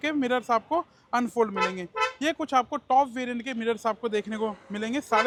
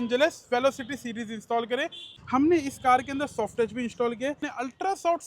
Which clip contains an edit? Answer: second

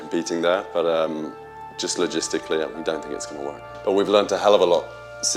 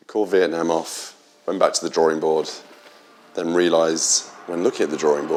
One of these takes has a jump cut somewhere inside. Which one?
first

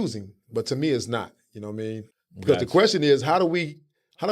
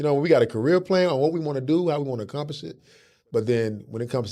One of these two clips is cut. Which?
first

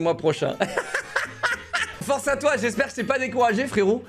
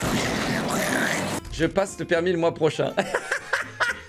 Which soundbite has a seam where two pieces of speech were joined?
second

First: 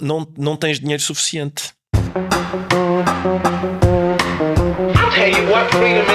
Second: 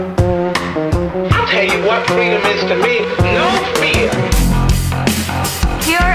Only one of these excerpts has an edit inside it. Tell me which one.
first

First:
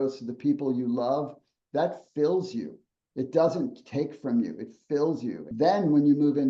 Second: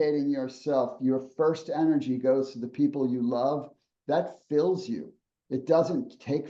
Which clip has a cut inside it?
first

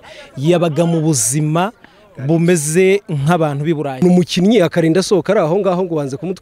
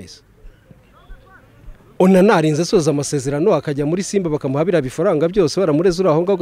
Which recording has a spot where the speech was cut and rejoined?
first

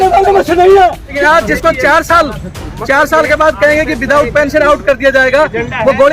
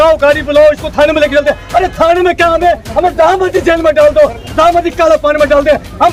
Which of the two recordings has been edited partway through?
first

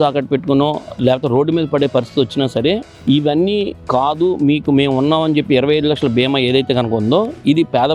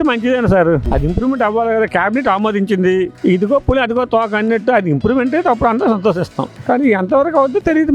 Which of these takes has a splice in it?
second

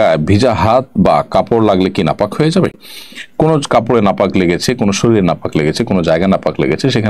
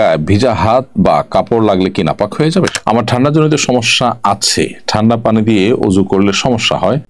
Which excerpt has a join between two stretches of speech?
second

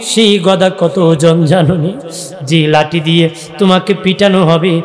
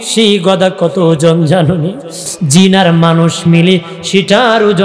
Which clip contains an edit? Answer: second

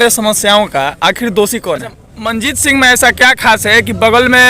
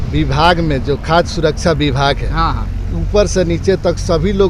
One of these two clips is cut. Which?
first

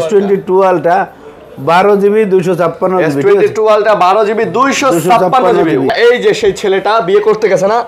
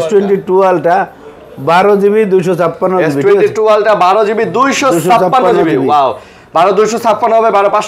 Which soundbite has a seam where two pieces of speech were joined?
first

